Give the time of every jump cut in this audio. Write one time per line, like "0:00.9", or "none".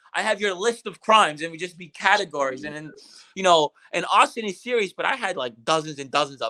none

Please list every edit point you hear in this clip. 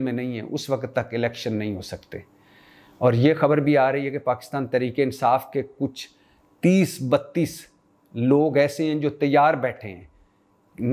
none

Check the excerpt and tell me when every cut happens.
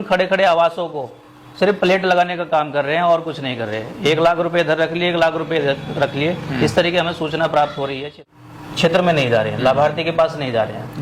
0:08.2

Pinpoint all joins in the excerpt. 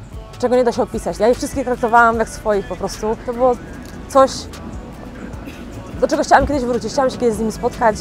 0:01.1
0:03.3

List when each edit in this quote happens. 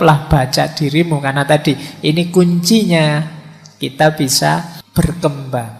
0:04.8

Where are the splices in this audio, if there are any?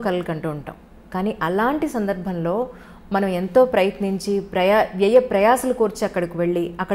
none

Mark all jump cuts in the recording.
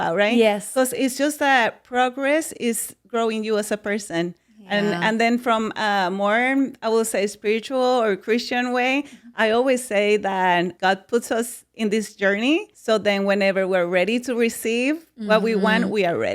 0:02.9
0:10.7
0:12.7

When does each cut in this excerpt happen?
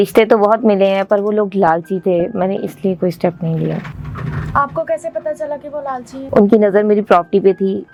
none

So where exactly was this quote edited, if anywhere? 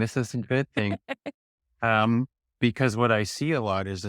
none

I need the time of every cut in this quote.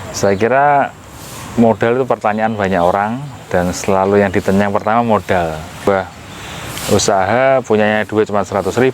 0:05.9

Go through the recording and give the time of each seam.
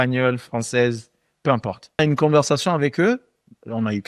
0:02.0

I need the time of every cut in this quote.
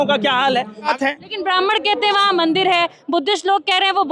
0:00.9

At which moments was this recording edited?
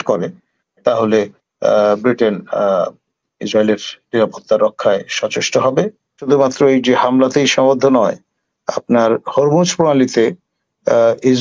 0:06.3

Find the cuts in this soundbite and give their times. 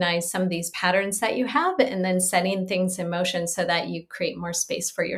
none

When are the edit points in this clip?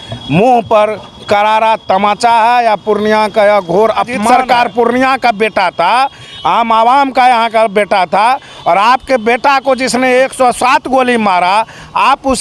0:04.3

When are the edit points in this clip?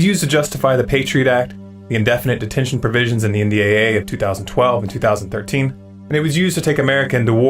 0:03.5

